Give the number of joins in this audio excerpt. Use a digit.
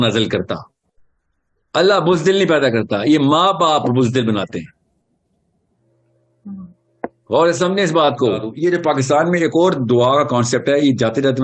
1